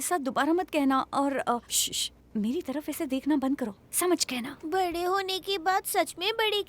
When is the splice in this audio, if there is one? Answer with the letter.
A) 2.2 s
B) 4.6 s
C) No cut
B